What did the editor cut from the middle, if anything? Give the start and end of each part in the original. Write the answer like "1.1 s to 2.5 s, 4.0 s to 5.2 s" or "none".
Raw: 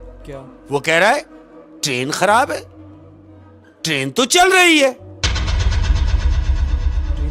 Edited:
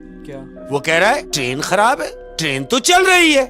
1.3 s to 1.8 s, 2.7 s to 3.7 s